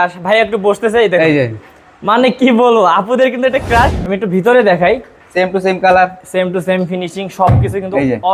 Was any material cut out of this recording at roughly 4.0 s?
yes; 1 cut; at 4.0 s

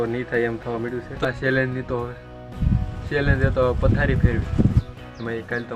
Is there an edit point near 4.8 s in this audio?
yes; 2 cuts; at 1.1 s, 4.8 s

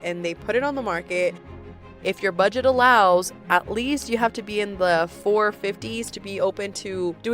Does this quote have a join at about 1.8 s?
yes; 1 cut; at 1.8 s

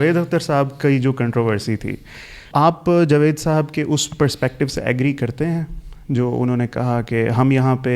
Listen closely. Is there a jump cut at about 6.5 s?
no; 1 cut; at 2.4 s

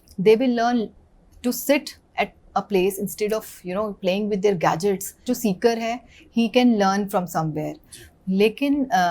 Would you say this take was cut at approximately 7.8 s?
no; 1 cut; at 5.2 s

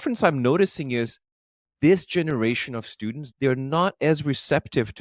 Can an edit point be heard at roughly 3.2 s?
yes; 1 cut; at 3.2 s

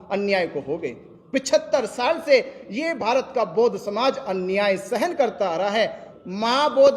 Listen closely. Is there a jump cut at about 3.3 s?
no; 1 cut; at 6.1 s

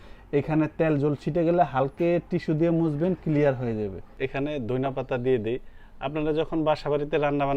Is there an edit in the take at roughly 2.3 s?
no; 1 cut; at 4.1 s

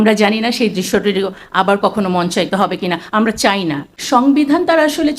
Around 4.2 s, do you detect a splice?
yes; 1 cut; at 4.2 s

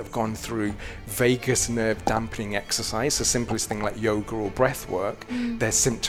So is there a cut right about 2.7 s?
no; 0 cuts

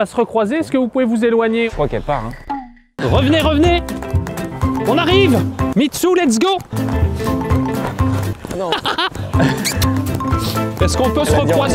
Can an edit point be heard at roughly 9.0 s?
no; 2 cuts; at 1.7 s, 5.7 s

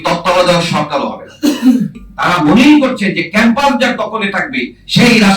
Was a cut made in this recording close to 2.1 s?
yes; 1 cut; at 2.1 s

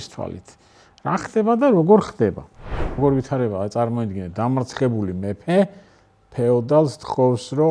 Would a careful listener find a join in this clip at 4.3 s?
no; 1 cut; at 3.0 s

